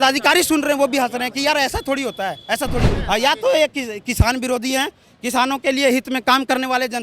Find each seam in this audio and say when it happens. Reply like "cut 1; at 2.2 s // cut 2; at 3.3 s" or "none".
cut 1; at 3.0 s